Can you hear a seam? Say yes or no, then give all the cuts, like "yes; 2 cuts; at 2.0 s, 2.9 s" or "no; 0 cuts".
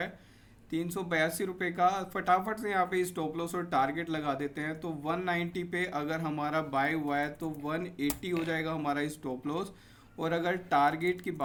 no; 0 cuts